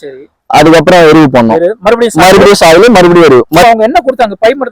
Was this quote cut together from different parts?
yes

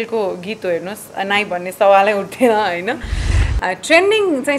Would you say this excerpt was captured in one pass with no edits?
no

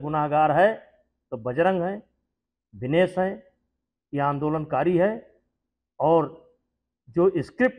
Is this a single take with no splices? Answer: yes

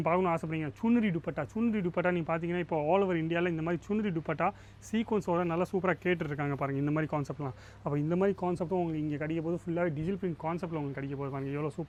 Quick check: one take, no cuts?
yes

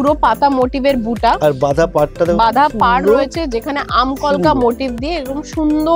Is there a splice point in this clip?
no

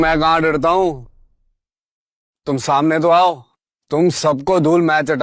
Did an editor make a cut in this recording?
no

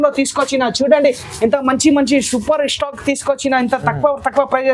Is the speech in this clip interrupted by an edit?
no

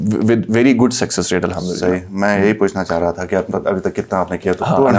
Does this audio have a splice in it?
no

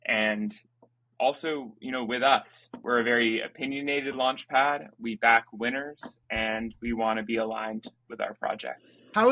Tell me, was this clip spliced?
yes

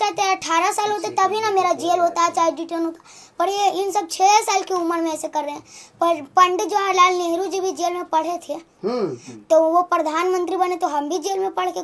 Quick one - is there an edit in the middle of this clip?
no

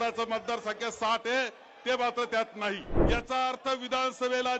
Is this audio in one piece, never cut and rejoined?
no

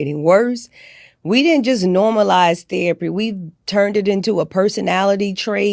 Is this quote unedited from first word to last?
yes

